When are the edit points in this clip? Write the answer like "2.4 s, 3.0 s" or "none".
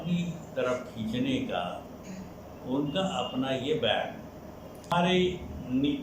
4.9 s